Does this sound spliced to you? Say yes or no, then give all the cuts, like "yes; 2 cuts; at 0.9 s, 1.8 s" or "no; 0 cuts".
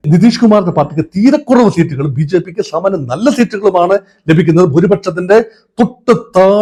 no; 0 cuts